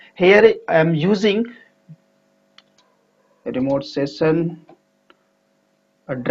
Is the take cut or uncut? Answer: cut